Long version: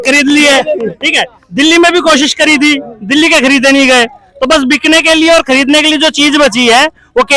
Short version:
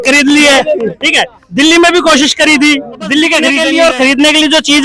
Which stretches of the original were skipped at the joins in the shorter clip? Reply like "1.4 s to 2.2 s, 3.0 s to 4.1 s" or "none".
3.5 s to 5.0 s